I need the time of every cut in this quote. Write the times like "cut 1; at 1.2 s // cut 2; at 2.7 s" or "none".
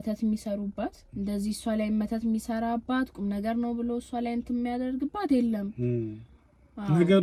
none